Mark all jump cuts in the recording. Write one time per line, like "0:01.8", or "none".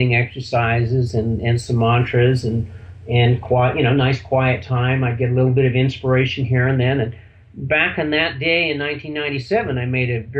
0:05.2